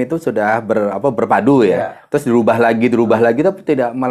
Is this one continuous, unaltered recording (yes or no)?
yes